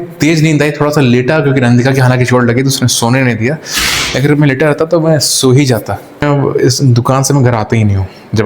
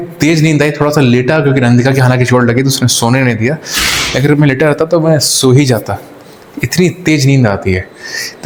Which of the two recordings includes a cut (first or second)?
first